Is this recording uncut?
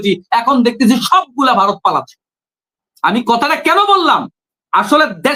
yes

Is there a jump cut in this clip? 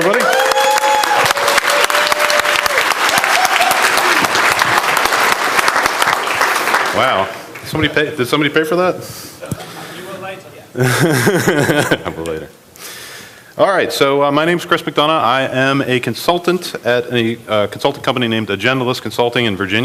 no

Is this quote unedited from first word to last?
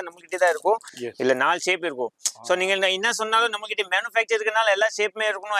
no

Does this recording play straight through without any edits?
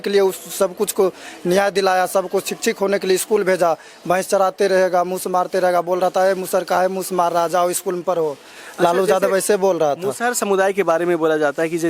yes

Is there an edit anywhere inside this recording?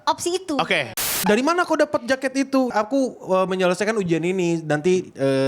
yes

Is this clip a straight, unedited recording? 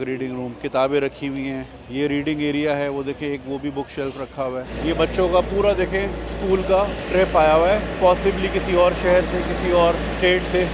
no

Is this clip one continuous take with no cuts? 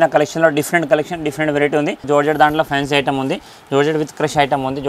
no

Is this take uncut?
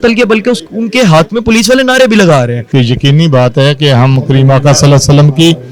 yes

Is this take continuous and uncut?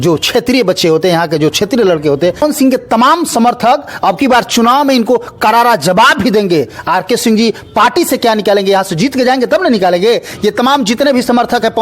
no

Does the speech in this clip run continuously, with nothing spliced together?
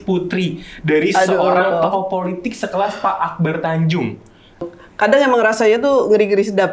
no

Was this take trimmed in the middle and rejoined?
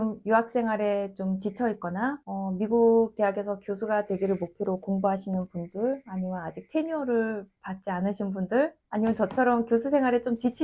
yes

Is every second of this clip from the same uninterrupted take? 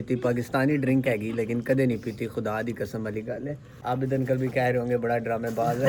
yes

